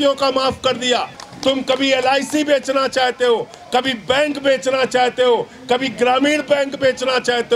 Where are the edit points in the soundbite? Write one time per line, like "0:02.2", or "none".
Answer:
0:01.2